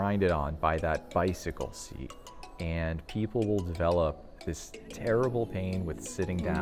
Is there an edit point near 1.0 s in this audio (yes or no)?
no